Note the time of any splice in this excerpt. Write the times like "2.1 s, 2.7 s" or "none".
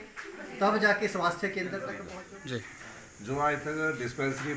2.1 s